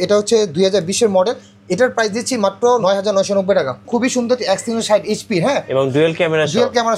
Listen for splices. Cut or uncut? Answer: cut